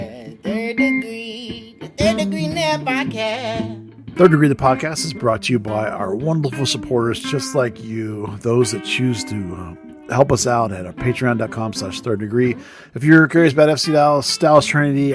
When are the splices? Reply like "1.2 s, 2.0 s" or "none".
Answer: 3.8 s